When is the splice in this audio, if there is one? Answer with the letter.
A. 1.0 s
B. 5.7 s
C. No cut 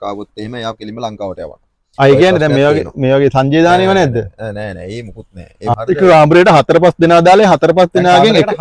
B